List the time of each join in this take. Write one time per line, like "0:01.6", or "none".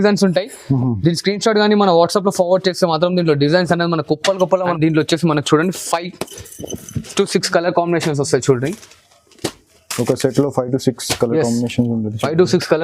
0:04.7